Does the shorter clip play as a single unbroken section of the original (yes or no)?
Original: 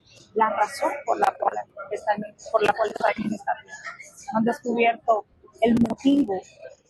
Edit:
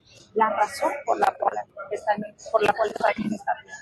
yes